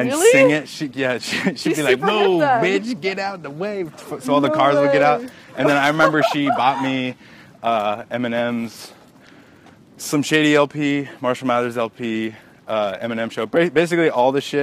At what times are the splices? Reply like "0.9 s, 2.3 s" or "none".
none